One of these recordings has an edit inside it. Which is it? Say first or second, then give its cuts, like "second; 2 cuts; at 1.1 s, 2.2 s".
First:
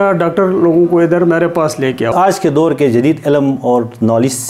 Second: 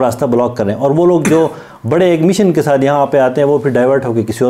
first; 1 cut; at 2.1 s